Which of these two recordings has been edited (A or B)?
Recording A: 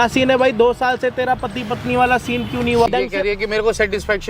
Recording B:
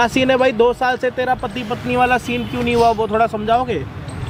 A